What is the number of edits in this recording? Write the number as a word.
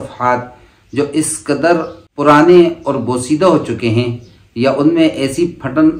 one